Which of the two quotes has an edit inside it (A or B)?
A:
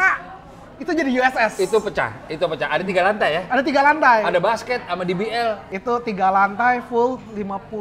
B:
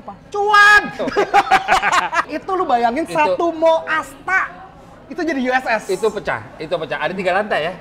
B